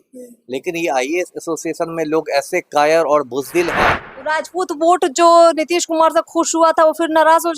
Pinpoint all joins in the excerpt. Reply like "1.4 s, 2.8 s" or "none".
4.1 s

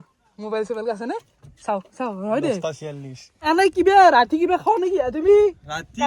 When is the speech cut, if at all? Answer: 3.3 s

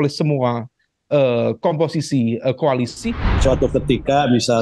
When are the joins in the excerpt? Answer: 3.4 s

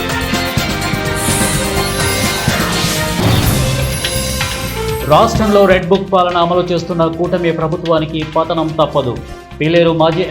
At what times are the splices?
4.9 s

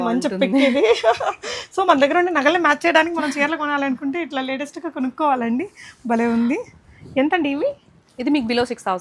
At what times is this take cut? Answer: none

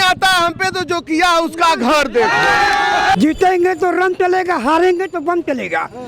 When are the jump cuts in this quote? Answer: 3.2 s

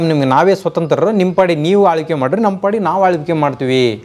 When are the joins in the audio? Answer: none

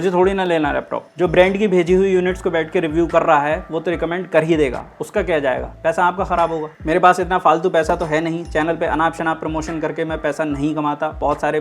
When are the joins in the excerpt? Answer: 1.0 s, 6.7 s

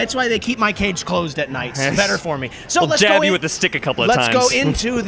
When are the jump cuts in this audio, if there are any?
1.5 s

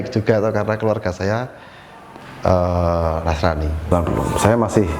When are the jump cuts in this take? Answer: 3.9 s

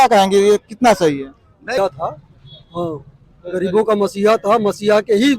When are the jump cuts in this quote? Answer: 1.8 s

